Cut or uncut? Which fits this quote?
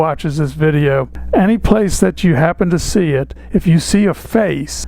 uncut